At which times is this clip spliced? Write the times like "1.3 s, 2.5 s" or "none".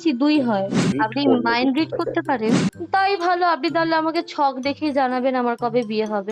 0.9 s, 2.7 s